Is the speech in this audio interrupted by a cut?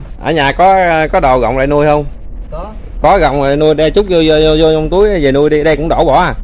no; 0 cuts

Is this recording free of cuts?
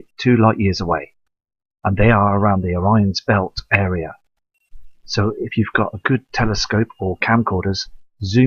yes; 0 cuts

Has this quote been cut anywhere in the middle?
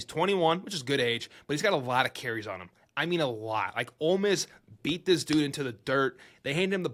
no; 0 cuts

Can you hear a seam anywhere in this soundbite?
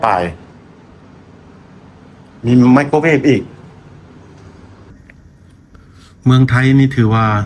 yes; 1 cut; at 4.9 s

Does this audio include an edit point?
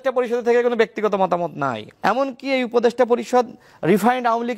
yes; 1 cut; at 1.8 s

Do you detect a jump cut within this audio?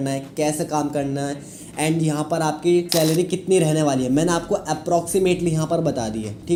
no; 0 cuts

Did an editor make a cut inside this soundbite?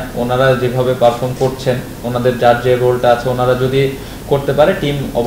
no; 0 cuts

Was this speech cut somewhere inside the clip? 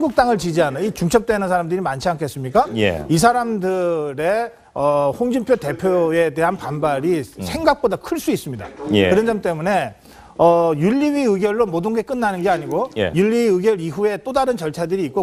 no; 0 cuts

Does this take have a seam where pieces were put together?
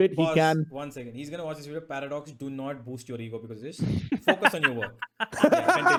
no; 0 cuts

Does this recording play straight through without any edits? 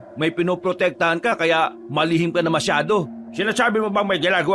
yes; 0 cuts

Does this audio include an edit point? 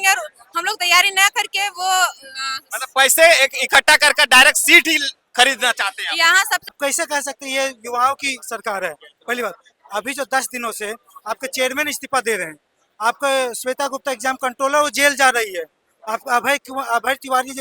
yes; 1 cut; at 6.7 s

